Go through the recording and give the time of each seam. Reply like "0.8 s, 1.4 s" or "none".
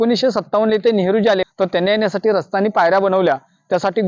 1.5 s